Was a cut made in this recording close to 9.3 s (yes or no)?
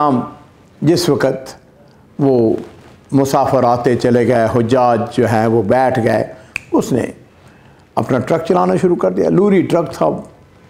no